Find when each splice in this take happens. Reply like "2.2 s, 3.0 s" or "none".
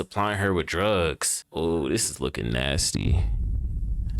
1.3 s